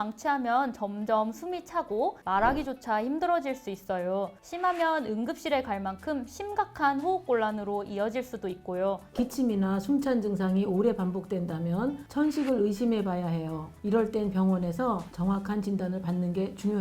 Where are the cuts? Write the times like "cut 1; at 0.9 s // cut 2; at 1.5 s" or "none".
cut 1; at 9.0 s // cut 2; at 15.1 s